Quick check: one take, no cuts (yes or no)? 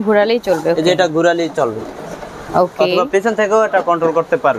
yes